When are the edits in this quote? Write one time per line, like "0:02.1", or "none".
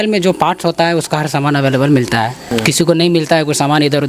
0:02.4